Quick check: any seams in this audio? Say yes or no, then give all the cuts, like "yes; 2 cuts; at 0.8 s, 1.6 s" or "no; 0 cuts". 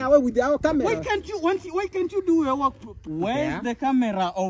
yes; 1 cut; at 2.9 s